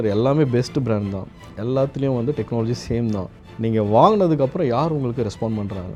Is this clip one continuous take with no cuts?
yes; 0 cuts

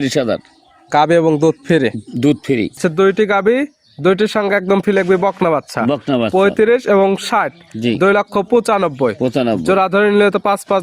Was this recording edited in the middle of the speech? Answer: yes; 1 cut; at 2.8 s

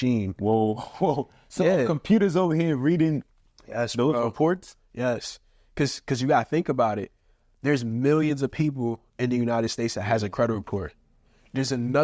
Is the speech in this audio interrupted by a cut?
no; 0 cuts

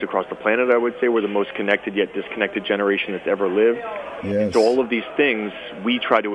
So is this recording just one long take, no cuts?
yes; 0 cuts

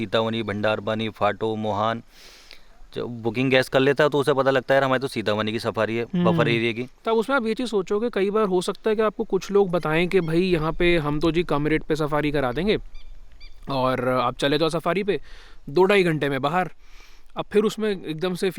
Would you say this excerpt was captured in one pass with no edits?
no; 1 cut; at 6.9 s

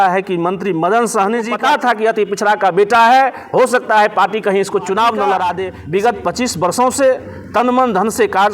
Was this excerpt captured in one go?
no; 2 cuts; at 1.5 s, 5.7 s

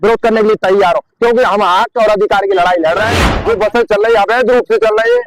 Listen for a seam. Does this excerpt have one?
yes; 1 cut; at 3.3 s

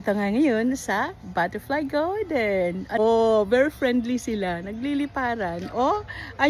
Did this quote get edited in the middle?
yes; 1 cut; at 3.0 s

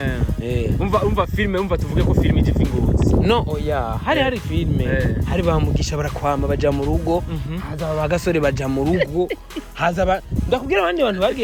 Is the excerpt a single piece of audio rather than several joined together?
yes; 0 cuts

